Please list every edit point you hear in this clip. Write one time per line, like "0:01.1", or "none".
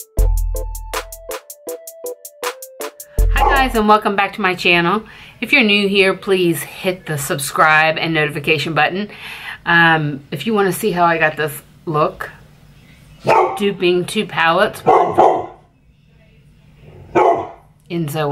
0:03.3